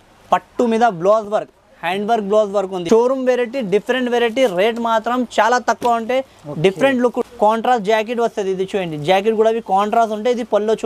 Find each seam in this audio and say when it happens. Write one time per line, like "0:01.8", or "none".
0:02.8
0:07.2